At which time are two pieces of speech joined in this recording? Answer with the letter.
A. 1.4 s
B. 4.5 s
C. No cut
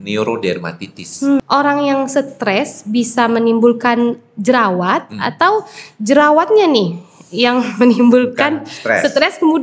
A